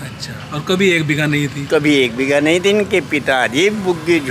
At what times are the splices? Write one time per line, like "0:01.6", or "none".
none